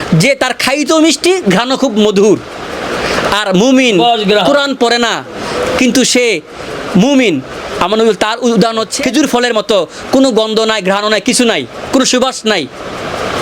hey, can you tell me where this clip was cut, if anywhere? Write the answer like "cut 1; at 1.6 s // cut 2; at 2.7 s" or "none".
cut 1; at 9.0 s

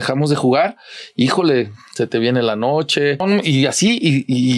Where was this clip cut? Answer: cut 1; at 3.2 s

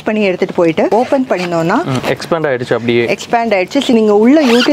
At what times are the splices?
cut 1; at 0.9 s // cut 2; at 2.0 s // cut 3; at 3.9 s

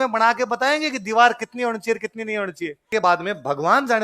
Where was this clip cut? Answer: cut 1; at 2.9 s

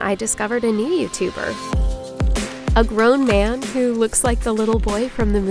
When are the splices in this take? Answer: none

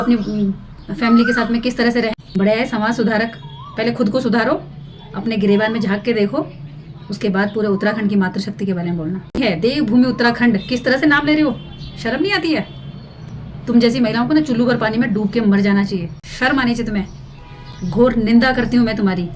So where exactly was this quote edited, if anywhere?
cut 1; at 2.2 s // cut 2; at 9.3 s // cut 3; at 16.1 s

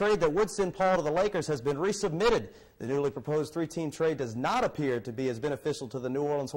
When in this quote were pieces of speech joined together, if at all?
none

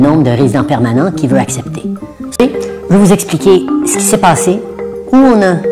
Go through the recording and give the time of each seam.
cut 1; at 2.4 s

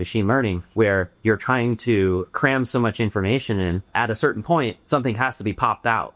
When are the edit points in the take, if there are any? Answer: cut 1; at 0.9 s // cut 2; at 2.3 s // cut 3; at 3.9 s // cut 4; at 4.8 s

